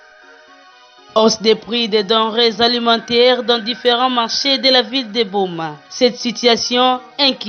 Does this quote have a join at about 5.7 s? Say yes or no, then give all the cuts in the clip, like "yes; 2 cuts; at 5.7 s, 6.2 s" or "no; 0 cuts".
no; 1 cut; at 1.1 s